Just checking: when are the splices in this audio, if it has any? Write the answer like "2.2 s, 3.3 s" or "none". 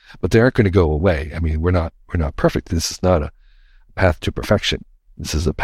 none

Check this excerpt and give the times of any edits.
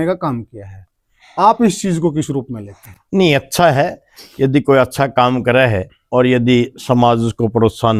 none

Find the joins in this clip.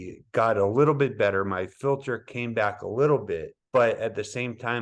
3.5 s

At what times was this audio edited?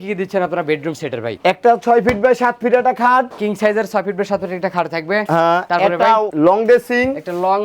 none

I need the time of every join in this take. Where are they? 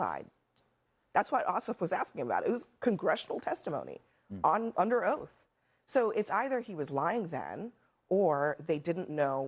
none

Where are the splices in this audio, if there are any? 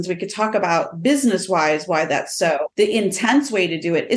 2.7 s

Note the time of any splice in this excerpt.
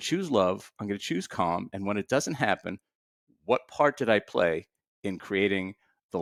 none

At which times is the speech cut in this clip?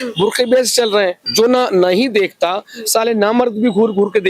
1.2 s

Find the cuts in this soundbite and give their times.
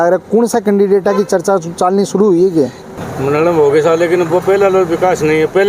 2.9 s

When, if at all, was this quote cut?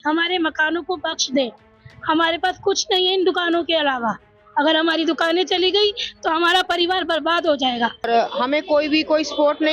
8.1 s

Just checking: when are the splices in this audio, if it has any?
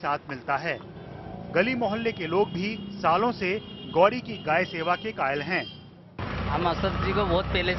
none

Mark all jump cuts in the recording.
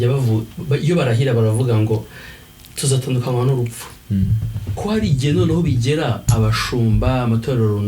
none

